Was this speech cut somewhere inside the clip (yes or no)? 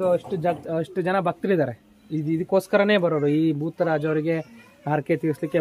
no